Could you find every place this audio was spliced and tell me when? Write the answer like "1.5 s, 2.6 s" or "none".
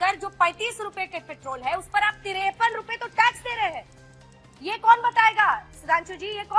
none